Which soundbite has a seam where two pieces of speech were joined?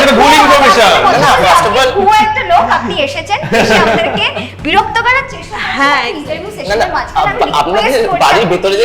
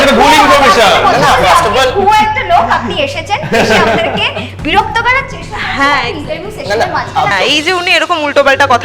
second; 1 cut; at 7.3 s

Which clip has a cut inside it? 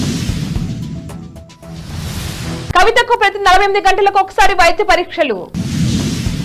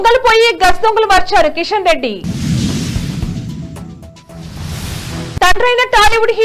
second; 2 cuts; at 1.8 s, 5.2 s

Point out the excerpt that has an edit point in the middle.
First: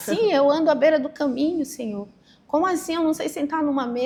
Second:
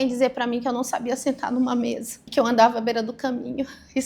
second; 1 cut; at 2.2 s

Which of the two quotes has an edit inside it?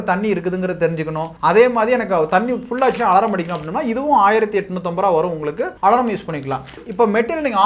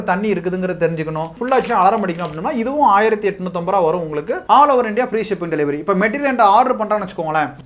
second; 2 cuts; at 1.3 s, 4.4 s

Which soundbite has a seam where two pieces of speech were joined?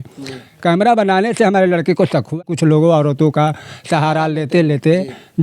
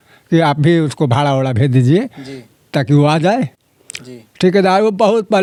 first; 1 cut; at 2.5 s

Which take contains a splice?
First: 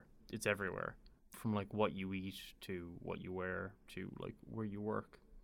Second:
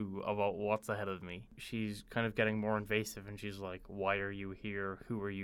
second; 1 cut; at 1.6 s

